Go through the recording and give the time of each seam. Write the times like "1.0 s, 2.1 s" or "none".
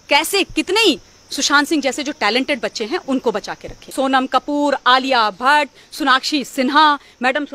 3.9 s